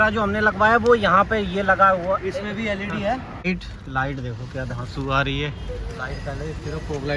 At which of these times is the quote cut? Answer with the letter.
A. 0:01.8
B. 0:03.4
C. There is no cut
B